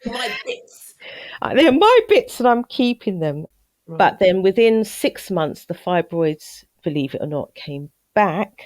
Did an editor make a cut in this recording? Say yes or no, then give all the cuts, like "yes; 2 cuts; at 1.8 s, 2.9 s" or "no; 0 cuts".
yes; 1 cut; at 3.4 s